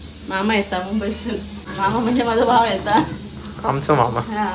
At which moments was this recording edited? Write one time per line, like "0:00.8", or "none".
0:01.6